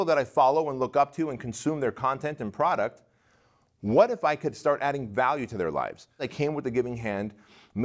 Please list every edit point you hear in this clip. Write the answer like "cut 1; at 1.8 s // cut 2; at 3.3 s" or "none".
cut 1; at 6.2 s